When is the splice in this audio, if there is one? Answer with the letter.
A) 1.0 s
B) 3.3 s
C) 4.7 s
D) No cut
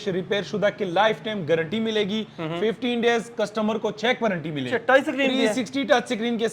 C